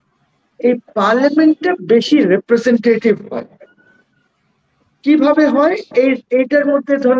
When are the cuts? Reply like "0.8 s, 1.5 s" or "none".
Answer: none